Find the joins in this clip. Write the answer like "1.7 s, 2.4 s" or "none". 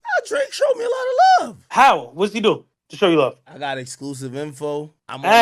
none